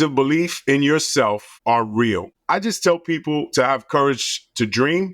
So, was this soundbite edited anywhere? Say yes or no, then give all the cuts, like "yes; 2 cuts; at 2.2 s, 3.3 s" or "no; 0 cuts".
yes; 2 cuts; at 1.5 s, 2.3 s